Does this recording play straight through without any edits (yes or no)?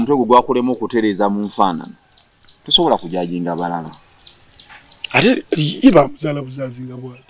yes